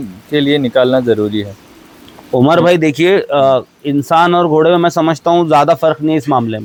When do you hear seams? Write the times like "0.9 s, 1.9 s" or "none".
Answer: none